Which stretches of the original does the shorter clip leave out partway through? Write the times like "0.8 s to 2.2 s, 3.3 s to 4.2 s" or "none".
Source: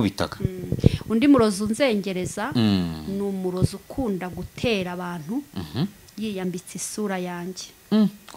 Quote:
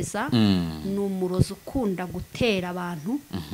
none